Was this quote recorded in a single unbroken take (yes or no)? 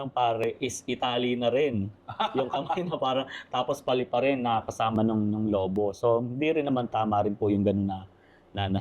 yes